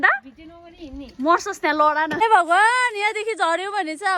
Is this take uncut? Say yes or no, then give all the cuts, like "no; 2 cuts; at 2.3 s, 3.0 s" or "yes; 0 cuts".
no; 1 cut; at 2.2 s